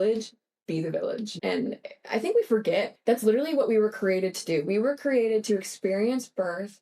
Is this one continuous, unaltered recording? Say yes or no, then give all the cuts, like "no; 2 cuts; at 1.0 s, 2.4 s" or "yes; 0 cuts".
no; 1 cut; at 1.3 s